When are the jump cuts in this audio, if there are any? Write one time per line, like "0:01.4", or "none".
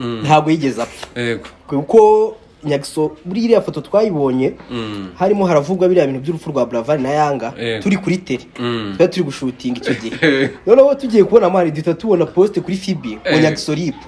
none